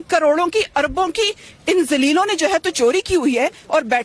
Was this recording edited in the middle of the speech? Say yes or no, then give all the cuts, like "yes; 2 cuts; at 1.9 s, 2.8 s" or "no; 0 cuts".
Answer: no; 0 cuts